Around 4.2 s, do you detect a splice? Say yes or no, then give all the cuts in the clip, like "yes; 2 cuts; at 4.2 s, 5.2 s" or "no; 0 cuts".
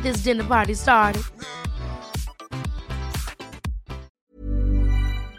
yes; 1 cut; at 4.2 s